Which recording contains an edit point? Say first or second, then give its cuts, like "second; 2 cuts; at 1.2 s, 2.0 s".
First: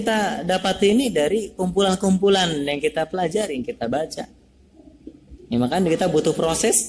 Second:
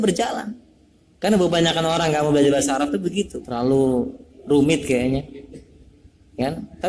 second; 1 cut; at 3.4 s